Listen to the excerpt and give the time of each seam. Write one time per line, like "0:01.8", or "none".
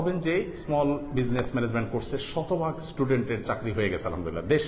none